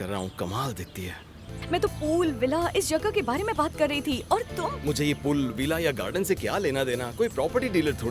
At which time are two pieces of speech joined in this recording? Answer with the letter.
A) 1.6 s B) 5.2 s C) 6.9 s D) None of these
A